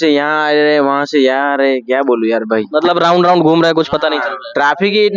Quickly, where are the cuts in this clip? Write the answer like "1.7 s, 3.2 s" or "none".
none